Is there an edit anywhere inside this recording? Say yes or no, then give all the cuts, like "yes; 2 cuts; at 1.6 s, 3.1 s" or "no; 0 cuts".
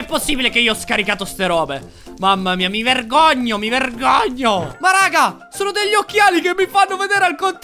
yes; 1 cut; at 4.7 s